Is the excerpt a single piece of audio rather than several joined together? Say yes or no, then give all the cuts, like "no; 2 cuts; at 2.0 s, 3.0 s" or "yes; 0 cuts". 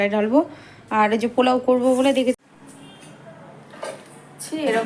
no; 1 cut; at 2.4 s